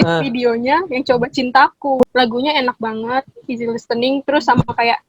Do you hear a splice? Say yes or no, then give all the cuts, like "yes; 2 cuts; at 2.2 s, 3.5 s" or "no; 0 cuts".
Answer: yes; 1 cut; at 2.1 s